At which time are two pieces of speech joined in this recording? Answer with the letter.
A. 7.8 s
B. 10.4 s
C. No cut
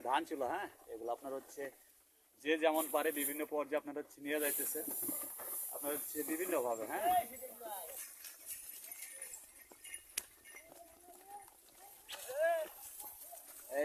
A